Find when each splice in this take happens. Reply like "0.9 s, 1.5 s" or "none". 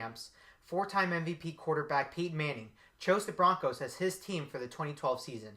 1.4 s